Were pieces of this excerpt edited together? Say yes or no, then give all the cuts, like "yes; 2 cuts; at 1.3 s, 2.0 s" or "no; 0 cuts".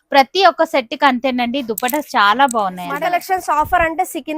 yes; 1 cut; at 2.9 s